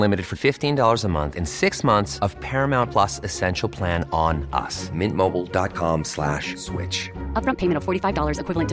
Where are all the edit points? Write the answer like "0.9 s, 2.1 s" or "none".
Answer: none